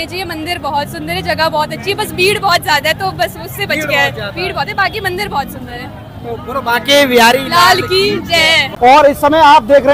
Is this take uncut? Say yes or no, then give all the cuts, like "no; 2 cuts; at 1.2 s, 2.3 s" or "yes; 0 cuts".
no; 1 cut; at 8.7 s